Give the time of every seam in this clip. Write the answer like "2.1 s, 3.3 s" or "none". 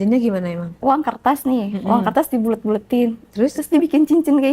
1.1 s